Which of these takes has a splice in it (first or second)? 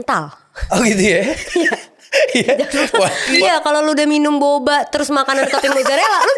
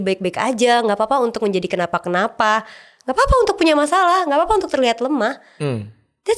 first